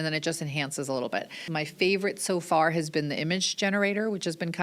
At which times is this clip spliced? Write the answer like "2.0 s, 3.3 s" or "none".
1.4 s